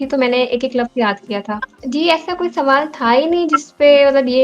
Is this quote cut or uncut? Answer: cut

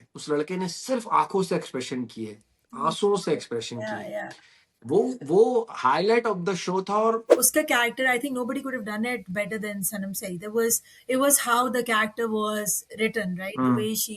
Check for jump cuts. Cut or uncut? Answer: cut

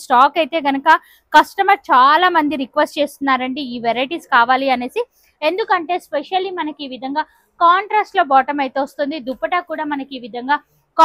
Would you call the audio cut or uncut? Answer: uncut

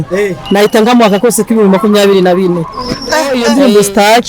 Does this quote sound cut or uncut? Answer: cut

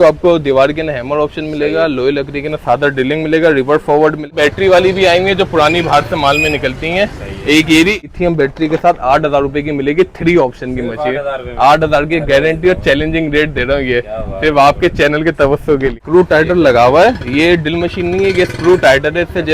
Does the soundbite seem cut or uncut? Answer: cut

